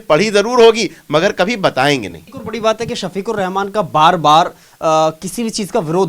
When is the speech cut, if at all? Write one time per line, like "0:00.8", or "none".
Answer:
none